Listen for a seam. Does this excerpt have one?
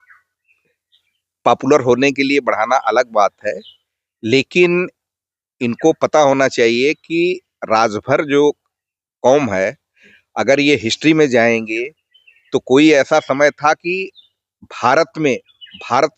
no; 0 cuts

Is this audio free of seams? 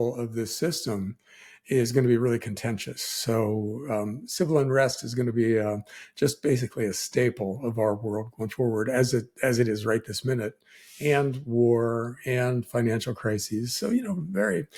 yes; 0 cuts

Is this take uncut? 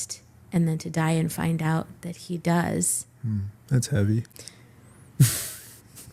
no; 1 cut; at 3.6 s

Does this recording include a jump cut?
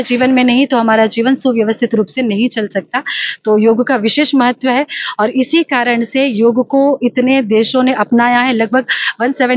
no; 0 cuts

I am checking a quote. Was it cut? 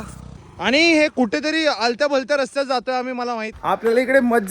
yes; 1 cut; at 3.5 s

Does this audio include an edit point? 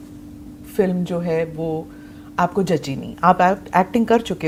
no; 0 cuts

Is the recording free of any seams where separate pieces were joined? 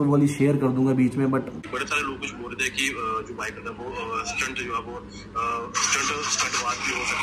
no; 1 cut; at 1.5 s

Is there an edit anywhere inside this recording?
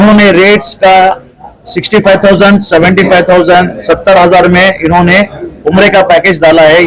no; 0 cuts

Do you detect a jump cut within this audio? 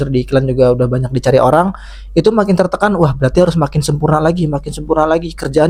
no; 0 cuts

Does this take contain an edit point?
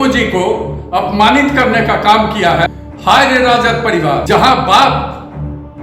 yes; 2 cuts; at 2.7 s, 4.2 s

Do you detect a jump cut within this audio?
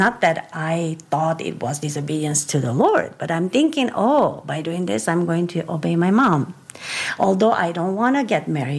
no; 0 cuts

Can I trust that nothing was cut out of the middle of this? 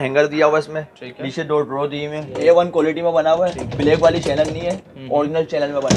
no; 1 cut; at 2.3 s

